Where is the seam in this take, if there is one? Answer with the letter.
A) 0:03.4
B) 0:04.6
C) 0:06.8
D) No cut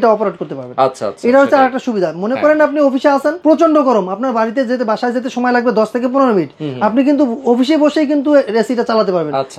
A